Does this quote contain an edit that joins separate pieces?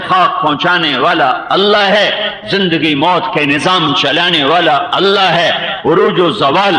no; 0 cuts

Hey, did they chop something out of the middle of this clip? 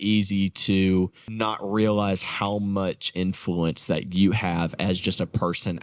yes; 1 cut; at 1.4 s

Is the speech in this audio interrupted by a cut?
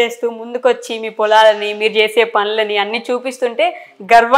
no; 0 cuts

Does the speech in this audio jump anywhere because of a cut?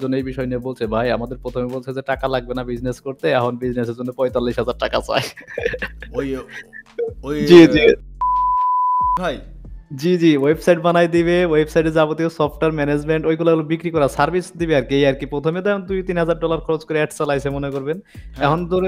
no; 0 cuts

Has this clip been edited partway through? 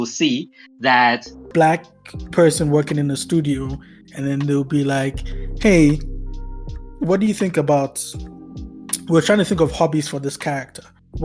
yes; 1 cut; at 1.4 s

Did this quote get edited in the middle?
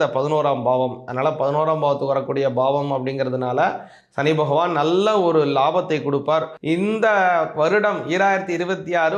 yes; 1 cut; at 6.5 s

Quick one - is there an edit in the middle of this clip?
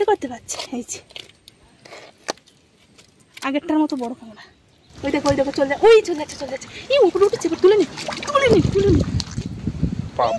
yes; 2 cuts; at 4.9 s, 9.2 s

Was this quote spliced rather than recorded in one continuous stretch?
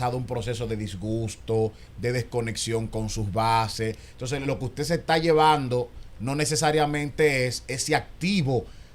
no; 0 cuts

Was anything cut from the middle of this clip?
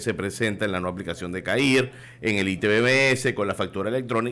yes; 1 cut; at 2.0 s

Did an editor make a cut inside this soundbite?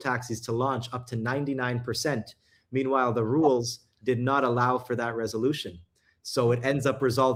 no; 0 cuts

